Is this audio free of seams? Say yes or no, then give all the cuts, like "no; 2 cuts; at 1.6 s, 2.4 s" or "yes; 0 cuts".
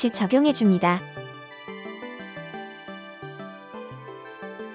no; 1 cut; at 1.0 s